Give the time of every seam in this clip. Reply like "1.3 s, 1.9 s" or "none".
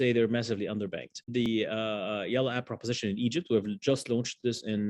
1.5 s